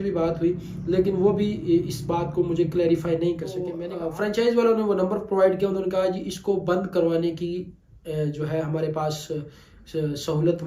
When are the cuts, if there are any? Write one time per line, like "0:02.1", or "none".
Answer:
0:03.9